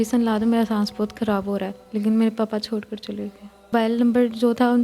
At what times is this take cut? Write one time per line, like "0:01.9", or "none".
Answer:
0:03.7